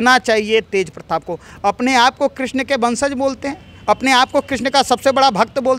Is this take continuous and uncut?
yes; 0 cuts

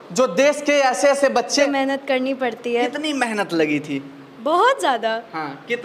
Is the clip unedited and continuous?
no; 1 cut; at 1.7 s

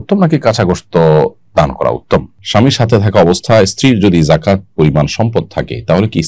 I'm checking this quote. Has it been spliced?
yes; 1 cut; at 2.4 s

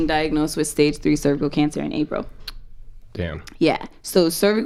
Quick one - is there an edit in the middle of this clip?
no; 0 cuts

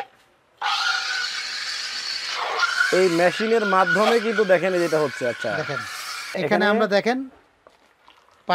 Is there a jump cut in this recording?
yes; 1 cut; at 6.4 s

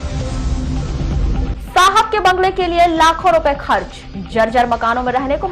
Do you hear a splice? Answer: yes; 1 cut; at 1.3 s

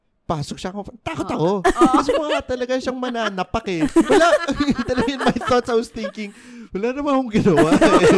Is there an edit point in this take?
no; 0 cuts

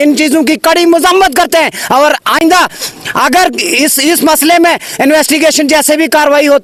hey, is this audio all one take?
yes; 0 cuts

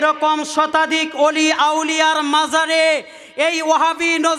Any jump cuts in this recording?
no; 0 cuts

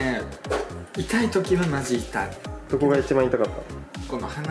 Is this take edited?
no; 0 cuts

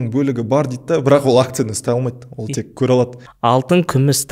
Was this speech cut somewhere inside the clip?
yes; 1 cut; at 3.2 s

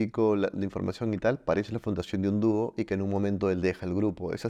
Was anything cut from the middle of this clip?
no; 0 cuts

